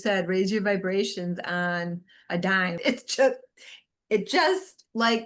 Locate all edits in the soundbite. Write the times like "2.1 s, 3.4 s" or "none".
2.8 s